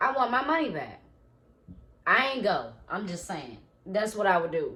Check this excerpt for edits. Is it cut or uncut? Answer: uncut